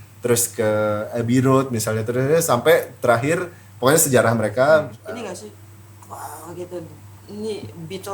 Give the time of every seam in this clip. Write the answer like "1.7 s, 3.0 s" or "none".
5.0 s